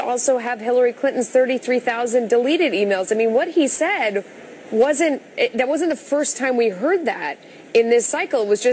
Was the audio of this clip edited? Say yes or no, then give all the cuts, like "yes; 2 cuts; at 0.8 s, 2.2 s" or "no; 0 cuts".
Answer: yes; 1 cut; at 4.6 s